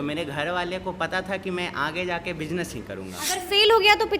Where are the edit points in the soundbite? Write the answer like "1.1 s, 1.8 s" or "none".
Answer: 3.2 s